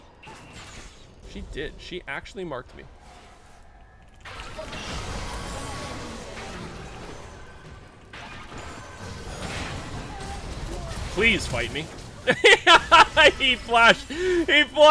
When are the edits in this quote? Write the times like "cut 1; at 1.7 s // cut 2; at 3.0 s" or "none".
cut 1; at 1.2 s